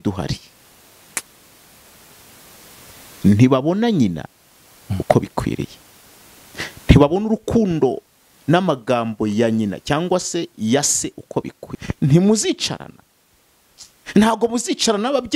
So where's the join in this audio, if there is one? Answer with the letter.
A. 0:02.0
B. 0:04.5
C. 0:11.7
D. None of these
C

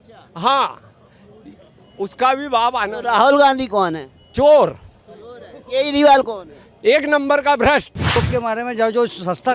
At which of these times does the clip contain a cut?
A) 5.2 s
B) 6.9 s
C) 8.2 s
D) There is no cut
C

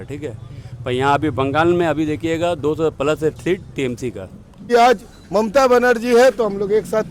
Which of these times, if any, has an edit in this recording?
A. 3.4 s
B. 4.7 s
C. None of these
B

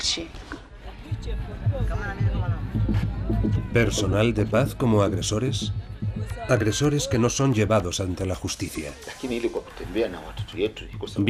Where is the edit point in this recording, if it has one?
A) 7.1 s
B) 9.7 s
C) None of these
A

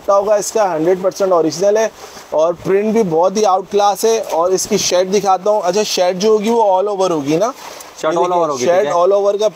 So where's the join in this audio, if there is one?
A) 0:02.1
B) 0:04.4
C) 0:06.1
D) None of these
D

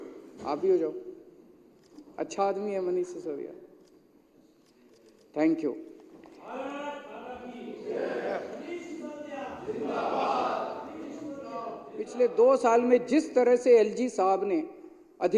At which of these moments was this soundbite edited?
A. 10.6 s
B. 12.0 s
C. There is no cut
B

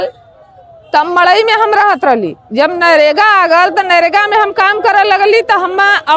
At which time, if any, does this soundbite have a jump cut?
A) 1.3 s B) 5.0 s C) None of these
C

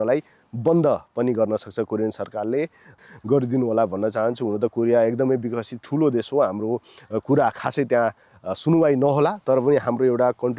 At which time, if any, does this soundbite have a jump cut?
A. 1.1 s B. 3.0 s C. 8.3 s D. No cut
B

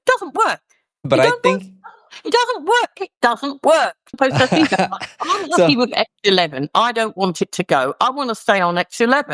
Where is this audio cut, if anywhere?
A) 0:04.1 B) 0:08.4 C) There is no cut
A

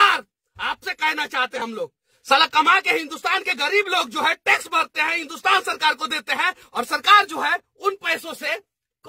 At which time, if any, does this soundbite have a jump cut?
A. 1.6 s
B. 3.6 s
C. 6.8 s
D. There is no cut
A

